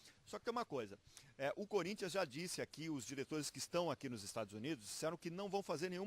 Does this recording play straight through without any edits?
no; 1 cut; at 4.6 s

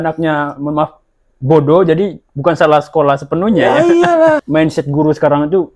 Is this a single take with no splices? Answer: no; 1 cut; at 4.4 s

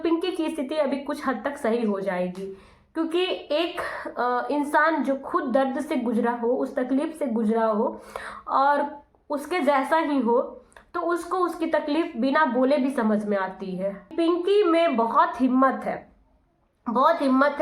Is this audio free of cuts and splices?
no; 1 cut; at 14.1 s

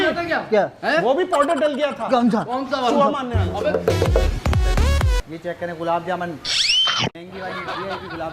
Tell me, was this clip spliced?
no; 0 cuts

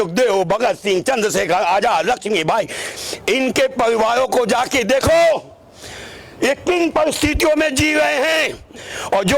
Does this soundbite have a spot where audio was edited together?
no; 0 cuts

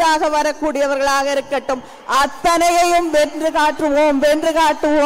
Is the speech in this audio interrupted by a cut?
no; 0 cuts

